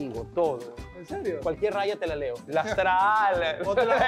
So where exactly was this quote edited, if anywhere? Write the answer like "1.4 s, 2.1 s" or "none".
2.4 s

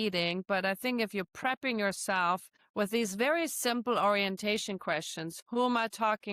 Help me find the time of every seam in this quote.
5.3 s

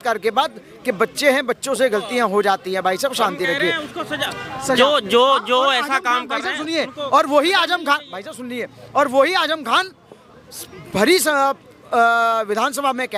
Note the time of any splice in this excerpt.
none

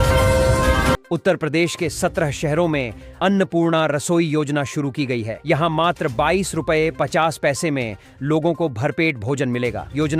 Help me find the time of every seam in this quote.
1.0 s

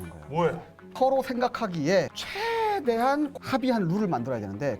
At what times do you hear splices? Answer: 1.0 s, 3.4 s

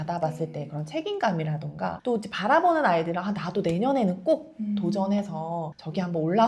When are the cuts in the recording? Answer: none

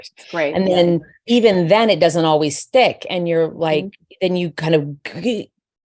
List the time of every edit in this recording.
none

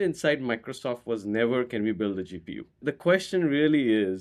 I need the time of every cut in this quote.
2.8 s

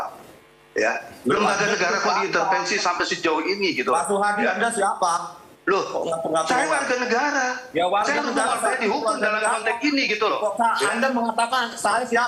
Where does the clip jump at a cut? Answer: none

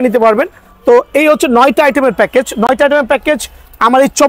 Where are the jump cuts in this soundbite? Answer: none

